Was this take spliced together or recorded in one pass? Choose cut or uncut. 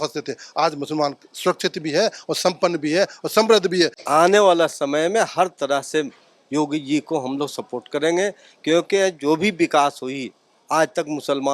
cut